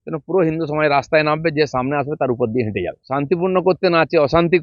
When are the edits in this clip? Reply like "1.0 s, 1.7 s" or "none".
2.9 s